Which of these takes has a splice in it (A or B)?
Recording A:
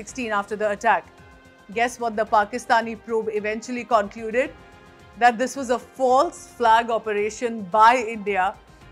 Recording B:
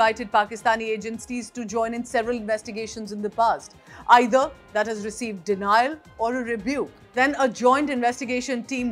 B